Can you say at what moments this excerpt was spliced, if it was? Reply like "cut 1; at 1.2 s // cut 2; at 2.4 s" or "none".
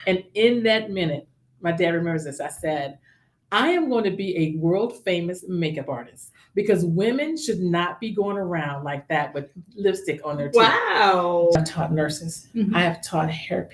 cut 1; at 11.6 s